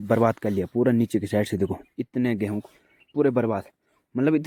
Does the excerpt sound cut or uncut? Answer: uncut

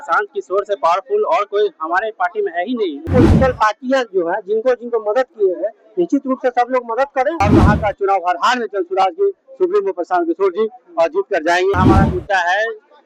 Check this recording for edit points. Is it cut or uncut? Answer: cut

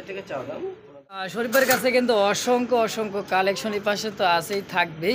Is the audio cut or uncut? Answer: cut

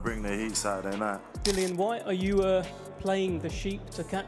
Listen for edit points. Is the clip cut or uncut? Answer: cut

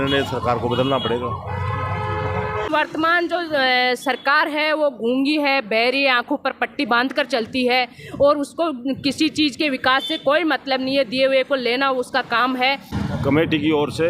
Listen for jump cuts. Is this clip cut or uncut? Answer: cut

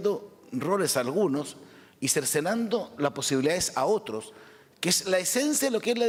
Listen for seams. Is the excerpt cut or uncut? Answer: uncut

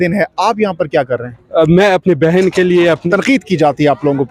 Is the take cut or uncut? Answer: cut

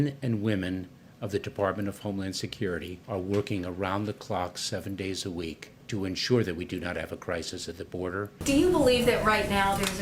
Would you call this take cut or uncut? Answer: cut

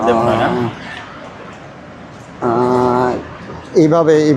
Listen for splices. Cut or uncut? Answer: uncut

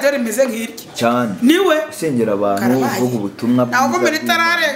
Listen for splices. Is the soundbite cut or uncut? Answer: uncut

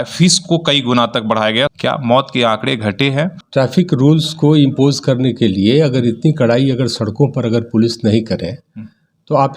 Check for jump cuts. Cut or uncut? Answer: cut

